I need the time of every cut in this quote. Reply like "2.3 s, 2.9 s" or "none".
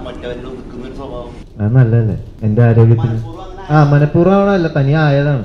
1.4 s, 2.3 s